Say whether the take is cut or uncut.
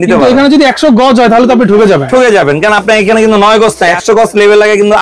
cut